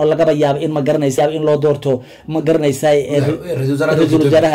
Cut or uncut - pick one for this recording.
cut